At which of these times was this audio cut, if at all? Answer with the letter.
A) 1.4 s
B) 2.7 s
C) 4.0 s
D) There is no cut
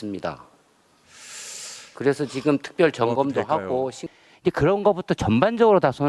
C